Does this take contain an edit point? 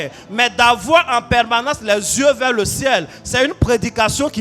no; 0 cuts

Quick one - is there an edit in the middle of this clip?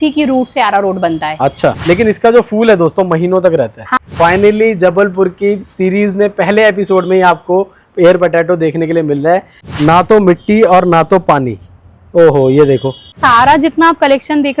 yes; 4 cuts; at 1.8 s, 3.9 s, 9.6 s, 13.2 s

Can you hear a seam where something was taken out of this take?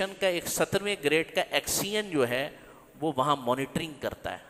no; 0 cuts

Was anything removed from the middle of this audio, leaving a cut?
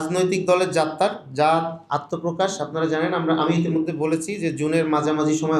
no; 0 cuts

